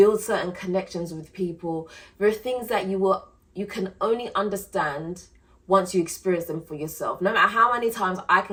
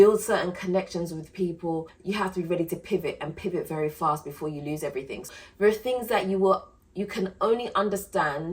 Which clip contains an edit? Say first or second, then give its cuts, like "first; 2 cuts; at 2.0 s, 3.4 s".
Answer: second; 2 cuts; at 1.9 s, 5.3 s